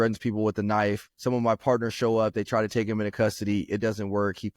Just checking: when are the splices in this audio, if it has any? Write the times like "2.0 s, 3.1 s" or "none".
none